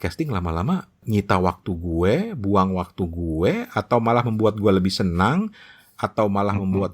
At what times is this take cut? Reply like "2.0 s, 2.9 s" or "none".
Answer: 1.0 s